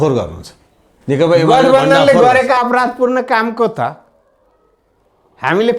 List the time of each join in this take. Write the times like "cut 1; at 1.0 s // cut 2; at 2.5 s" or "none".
none